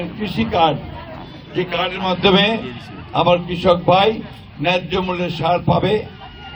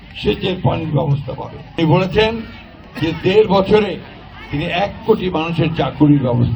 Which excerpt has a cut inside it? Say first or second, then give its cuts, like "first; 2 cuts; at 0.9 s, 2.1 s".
second; 1 cut; at 1.8 s